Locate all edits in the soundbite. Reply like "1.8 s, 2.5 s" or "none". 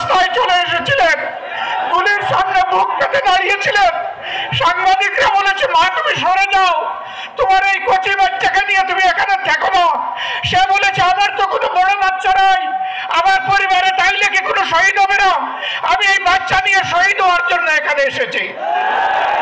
none